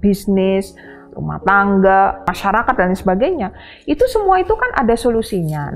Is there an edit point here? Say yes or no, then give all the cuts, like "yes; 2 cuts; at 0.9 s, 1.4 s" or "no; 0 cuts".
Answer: yes; 1 cut; at 2.3 s